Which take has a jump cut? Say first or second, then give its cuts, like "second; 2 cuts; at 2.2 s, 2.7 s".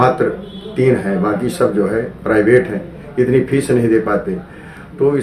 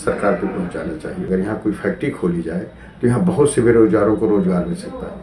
second; 1 cut; at 1.3 s